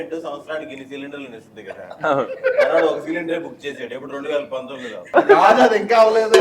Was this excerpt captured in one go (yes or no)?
no